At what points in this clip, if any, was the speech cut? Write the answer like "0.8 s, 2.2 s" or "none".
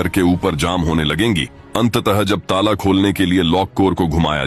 none